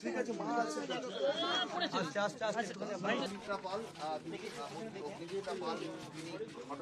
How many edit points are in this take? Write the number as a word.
one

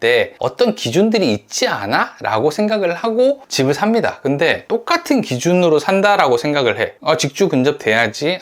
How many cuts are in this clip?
zero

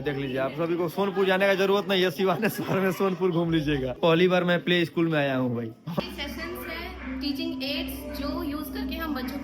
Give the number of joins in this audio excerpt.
two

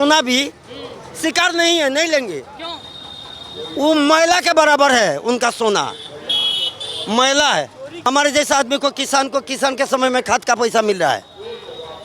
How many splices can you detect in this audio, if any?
one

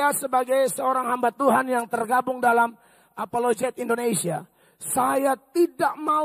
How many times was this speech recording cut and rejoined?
zero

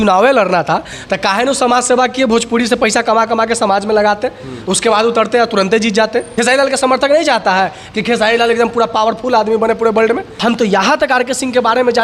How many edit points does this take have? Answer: two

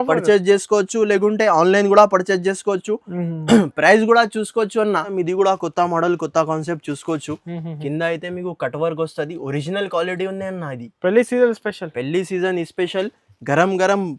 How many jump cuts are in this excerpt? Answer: one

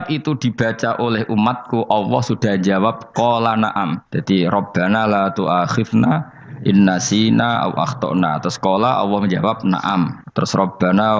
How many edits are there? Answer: two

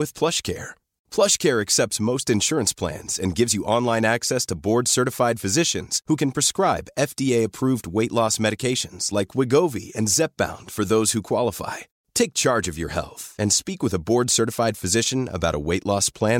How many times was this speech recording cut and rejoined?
zero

